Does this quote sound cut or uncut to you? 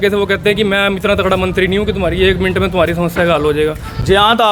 uncut